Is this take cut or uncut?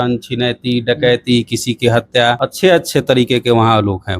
cut